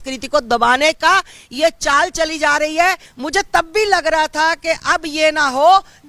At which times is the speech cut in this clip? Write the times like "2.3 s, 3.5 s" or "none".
3.1 s